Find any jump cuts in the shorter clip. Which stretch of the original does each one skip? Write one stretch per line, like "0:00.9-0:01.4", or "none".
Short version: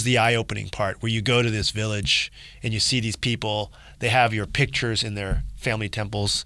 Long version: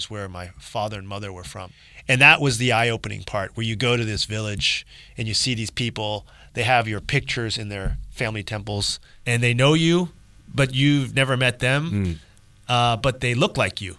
none